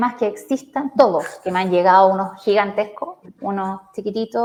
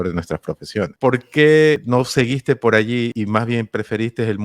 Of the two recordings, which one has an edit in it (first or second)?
second